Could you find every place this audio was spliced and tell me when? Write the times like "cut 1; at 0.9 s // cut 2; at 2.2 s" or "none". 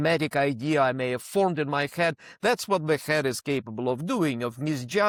none